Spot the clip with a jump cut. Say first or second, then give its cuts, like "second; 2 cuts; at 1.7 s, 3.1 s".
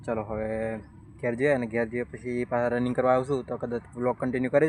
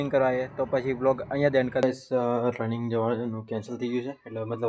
second; 1 cut; at 1.8 s